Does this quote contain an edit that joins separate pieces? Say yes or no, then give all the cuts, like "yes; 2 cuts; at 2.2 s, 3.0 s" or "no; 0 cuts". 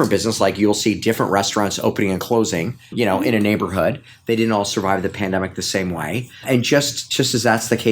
yes; 2 cuts; at 2.9 s, 6.3 s